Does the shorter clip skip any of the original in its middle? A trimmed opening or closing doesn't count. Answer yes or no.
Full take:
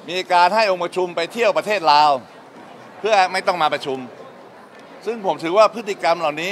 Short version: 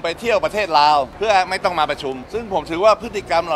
yes